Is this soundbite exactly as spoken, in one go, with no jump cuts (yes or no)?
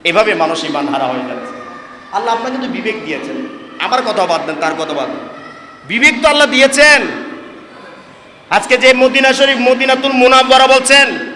yes